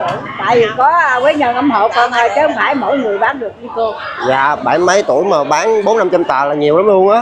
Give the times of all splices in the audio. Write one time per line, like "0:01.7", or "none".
none